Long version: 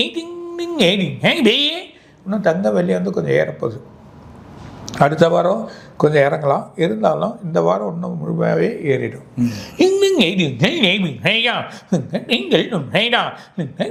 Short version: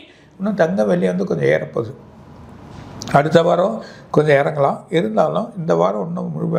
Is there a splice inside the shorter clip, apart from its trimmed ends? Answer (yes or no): no